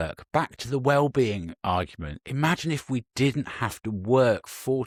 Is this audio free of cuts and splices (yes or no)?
yes